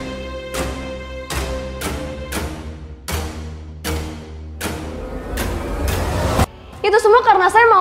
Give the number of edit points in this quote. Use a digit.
1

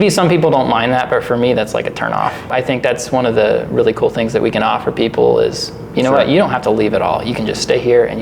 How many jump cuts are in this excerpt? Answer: 1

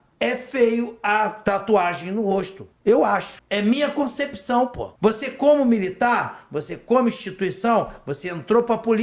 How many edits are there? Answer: 4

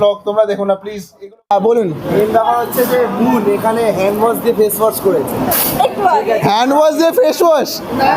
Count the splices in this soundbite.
1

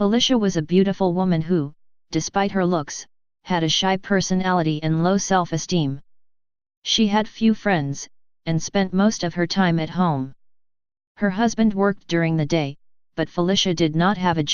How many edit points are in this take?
1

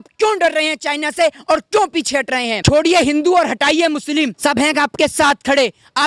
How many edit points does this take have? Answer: 2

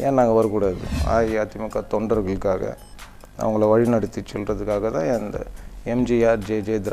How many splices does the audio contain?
1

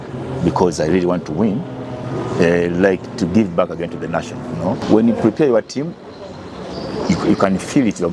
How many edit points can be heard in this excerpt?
1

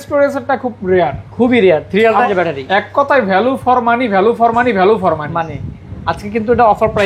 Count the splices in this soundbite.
1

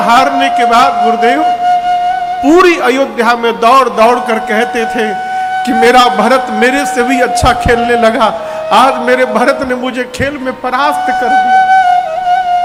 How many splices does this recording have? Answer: 0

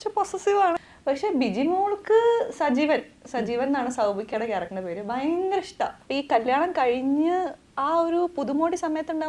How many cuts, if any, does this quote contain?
2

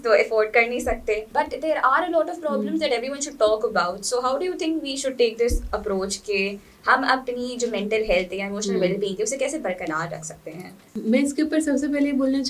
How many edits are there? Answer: 0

